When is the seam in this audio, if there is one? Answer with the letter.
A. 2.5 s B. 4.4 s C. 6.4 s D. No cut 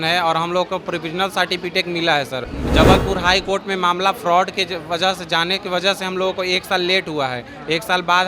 A